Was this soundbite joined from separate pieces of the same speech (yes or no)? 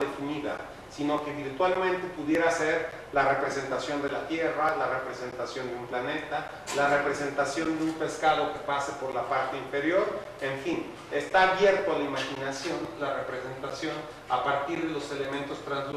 no